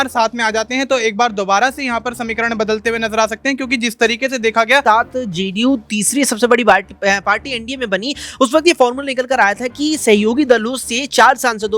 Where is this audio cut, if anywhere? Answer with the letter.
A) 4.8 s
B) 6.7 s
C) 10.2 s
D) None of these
A